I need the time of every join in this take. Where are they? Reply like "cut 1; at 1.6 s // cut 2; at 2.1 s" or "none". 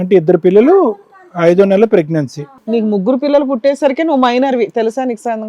cut 1; at 2.5 s